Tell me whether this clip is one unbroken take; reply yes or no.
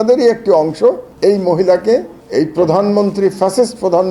no